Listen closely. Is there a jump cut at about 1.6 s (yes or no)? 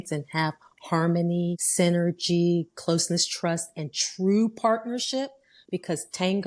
yes